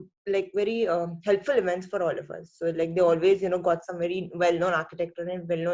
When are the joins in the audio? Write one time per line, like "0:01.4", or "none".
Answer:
none